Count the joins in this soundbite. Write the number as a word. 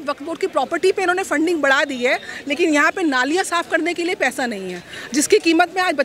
zero